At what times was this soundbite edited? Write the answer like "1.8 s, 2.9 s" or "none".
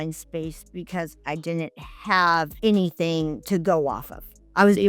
2.5 s